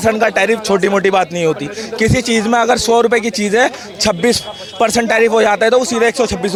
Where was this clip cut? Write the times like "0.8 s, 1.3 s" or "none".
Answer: none